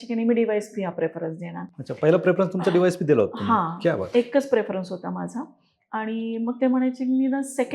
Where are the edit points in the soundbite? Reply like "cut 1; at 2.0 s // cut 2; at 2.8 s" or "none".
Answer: none